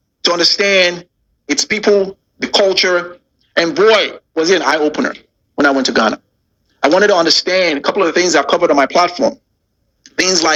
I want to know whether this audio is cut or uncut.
uncut